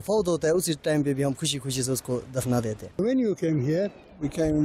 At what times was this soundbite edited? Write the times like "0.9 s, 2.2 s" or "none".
3.0 s